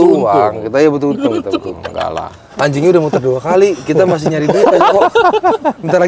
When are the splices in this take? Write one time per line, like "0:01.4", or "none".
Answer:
0:02.4